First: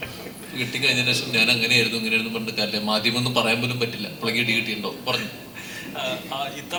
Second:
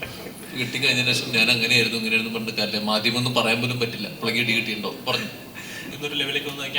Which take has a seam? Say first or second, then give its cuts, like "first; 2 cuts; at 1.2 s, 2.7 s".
second; 1 cut; at 5.9 s